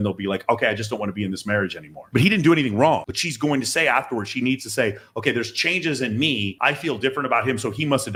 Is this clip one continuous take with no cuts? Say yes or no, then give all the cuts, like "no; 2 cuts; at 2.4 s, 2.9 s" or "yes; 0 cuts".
yes; 0 cuts